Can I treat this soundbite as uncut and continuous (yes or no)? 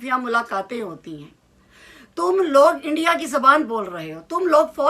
yes